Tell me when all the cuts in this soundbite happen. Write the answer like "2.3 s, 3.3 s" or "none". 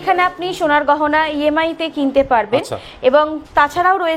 none